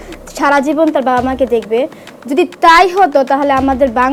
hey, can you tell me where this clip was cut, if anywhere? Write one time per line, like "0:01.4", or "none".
none

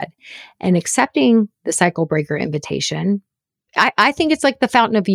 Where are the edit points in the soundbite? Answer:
0:03.6

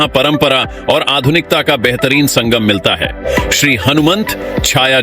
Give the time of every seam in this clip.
0:03.2

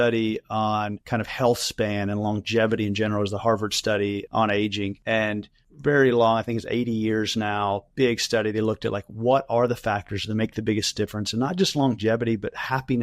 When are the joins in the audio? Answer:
0:01.0

